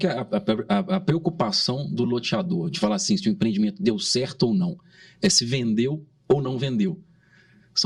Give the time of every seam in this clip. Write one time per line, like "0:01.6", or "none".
none